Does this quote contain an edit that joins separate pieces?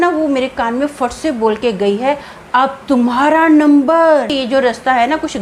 yes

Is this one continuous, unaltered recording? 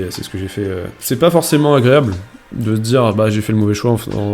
no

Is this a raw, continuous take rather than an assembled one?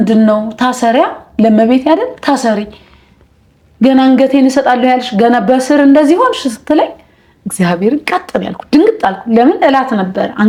yes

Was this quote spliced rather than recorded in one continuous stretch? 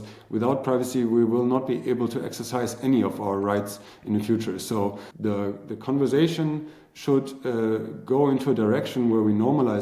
yes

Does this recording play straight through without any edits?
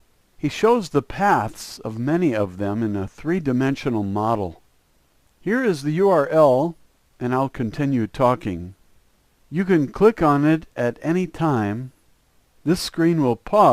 no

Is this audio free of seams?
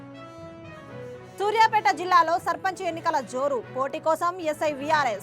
no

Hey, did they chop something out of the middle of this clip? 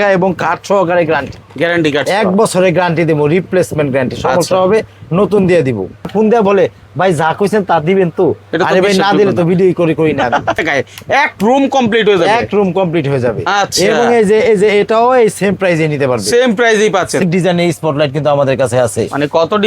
yes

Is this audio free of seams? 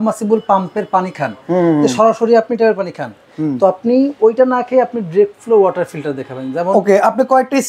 yes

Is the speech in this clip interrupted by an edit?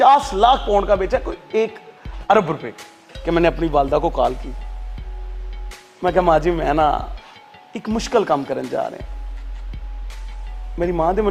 no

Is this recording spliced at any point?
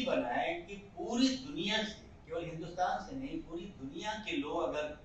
no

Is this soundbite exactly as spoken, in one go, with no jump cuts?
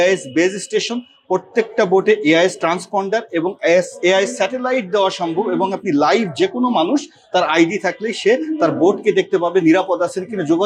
yes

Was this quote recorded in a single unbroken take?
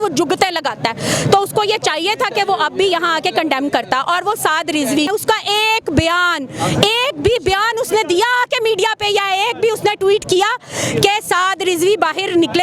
no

